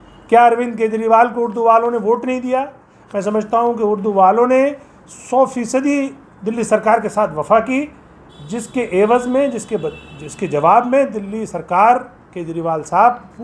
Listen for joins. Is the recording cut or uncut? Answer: uncut